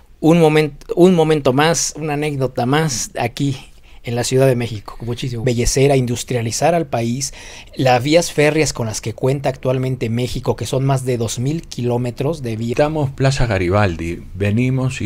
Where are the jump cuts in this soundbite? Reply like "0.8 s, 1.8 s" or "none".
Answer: 5.4 s, 12.7 s